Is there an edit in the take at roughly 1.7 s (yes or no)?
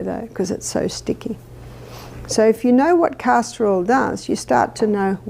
yes